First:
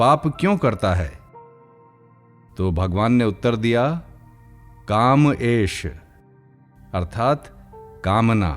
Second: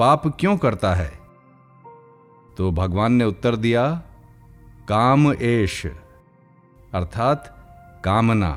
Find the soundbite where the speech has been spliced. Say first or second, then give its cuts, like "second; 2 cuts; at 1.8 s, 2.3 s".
first; 2 cuts; at 1.2 s, 2.5 s